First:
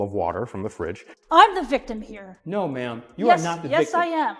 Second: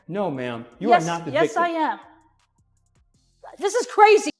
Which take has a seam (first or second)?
first